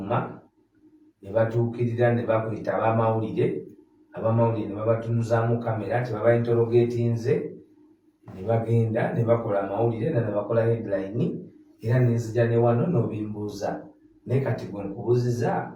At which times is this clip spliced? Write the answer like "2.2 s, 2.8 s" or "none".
none